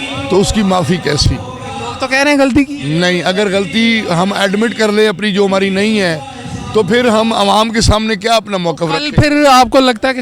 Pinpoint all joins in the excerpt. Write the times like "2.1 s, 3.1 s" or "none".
none